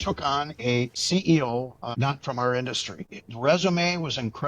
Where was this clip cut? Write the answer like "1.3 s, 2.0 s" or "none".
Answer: 0.9 s, 1.9 s, 3.2 s